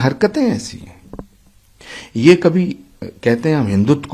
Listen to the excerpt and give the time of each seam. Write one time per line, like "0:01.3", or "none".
none